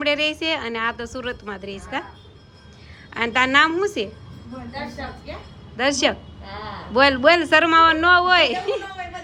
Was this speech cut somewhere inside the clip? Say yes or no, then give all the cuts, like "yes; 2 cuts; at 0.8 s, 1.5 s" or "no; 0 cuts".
no; 0 cuts